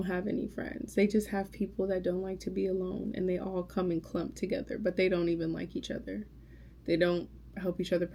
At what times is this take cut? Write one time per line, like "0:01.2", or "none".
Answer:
none

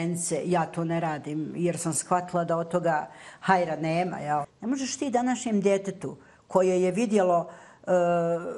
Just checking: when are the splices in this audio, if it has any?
0:04.5

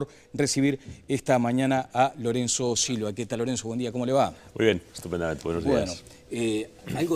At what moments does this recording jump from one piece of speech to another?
0:02.5

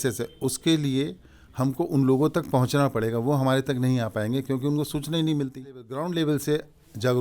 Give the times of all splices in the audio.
0:06.0

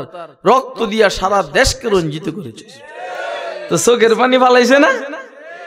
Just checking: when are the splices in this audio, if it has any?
none

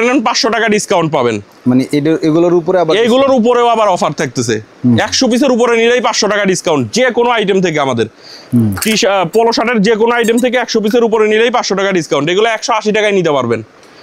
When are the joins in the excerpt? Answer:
none

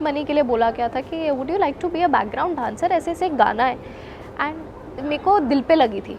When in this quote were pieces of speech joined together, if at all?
0:05.0

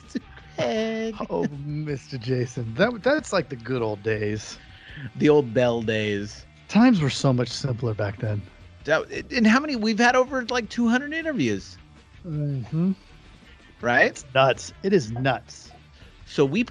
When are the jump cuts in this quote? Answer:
none

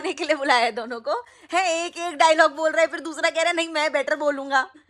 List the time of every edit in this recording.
none

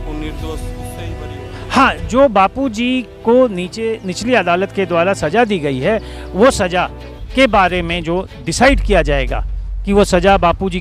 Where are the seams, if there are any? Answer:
none

